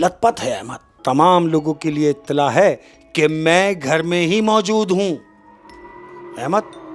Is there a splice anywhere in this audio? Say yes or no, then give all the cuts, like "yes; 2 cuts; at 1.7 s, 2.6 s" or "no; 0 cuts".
yes; 1 cut; at 0.9 s